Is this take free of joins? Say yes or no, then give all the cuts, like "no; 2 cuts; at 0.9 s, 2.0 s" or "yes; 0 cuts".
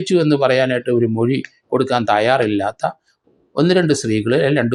yes; 0 cuts